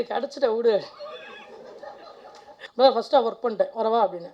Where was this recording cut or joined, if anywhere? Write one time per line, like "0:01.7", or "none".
0:02.6